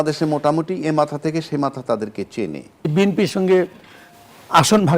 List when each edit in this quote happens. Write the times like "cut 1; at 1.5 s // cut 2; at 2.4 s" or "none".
cut 1; at 2.8 s